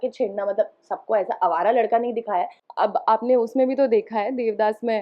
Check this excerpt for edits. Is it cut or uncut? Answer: cut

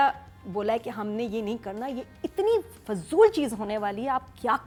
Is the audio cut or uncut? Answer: uncut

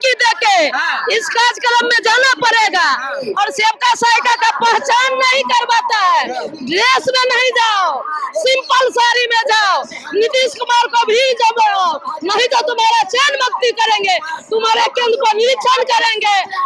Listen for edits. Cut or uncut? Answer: uncut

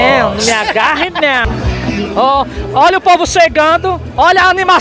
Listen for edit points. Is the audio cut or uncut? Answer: cut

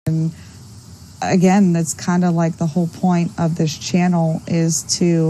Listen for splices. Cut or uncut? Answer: uncut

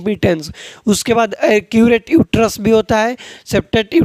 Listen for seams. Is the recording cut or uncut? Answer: uncut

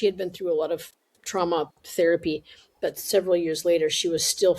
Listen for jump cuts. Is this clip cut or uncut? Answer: uncut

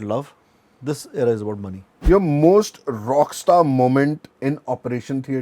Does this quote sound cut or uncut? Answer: cut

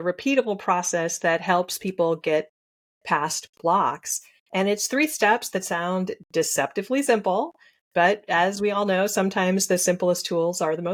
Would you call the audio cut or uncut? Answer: uncut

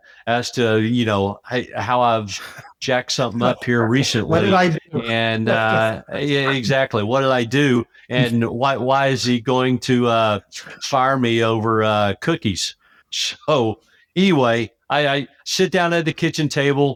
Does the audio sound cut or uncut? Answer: uncut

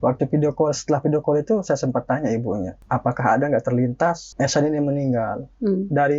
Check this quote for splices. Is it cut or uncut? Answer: cut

